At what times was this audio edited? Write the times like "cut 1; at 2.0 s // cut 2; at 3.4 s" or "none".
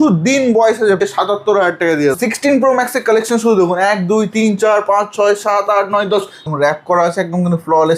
cut 1; at 1.0 s // cut 2; at 2.2 s // cut 3; at 6.4 s